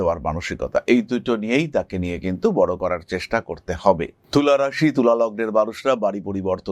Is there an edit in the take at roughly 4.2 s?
yes; 1 cut; at 4.2 s

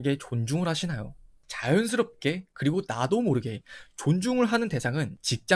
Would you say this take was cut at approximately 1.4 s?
yes; 1 cut; at 1.4 s

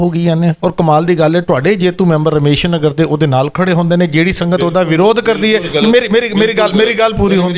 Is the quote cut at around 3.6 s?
no; 0 cuts

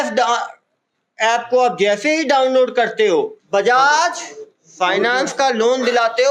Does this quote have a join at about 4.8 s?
no; 1 cut; at 3.4 s

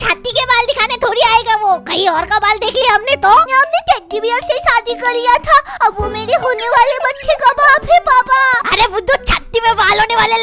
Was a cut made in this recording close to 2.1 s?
no; 2 cuts; at 3.5 s, 8.6 s

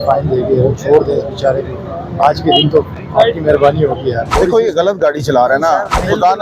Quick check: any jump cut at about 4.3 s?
yes; 1 cut; at 4.3 s

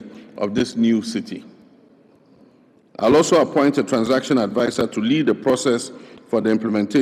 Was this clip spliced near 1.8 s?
no; 0 cuts

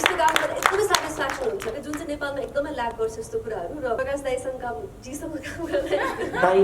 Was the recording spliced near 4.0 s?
yes; 1 cut; at 4.0 s

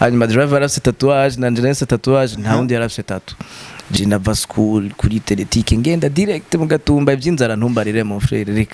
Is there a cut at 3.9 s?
yes; 1 cut; at 3.9 s

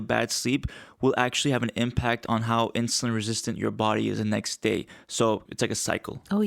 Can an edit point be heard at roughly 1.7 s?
no; 1 cut; at 5.4 s

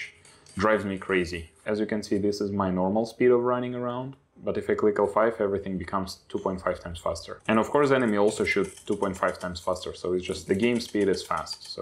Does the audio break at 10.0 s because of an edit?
no; 2 cuts; at 1.5 s, 7.3 s

